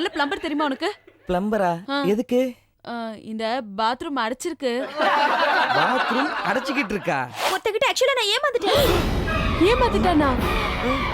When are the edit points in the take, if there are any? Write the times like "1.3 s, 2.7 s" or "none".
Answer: 7.4 s

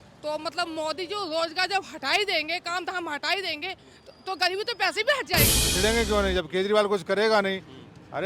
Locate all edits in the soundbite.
5.7 s

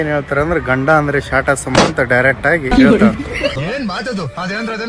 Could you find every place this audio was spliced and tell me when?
3.6 s

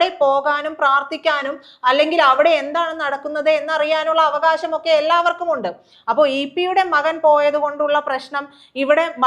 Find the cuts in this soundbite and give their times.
none

